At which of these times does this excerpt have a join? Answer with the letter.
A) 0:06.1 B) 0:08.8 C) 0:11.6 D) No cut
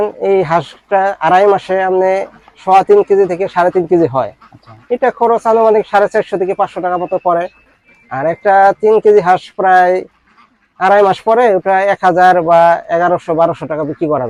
D